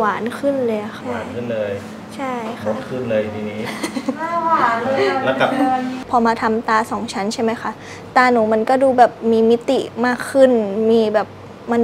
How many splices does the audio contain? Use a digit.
2